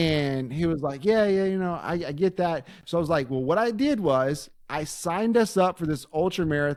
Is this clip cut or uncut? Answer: uncut